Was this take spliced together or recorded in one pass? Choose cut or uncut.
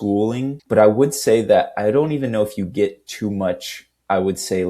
uncut